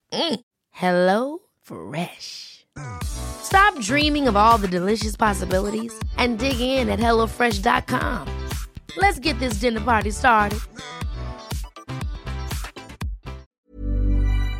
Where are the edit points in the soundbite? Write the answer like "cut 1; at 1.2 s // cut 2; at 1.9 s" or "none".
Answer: cut 1; at 13.5 s